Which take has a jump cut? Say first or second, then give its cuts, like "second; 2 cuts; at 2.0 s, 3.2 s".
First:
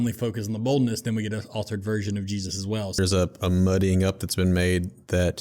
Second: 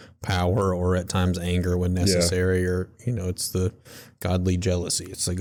first; 1 cut; at 3.0 s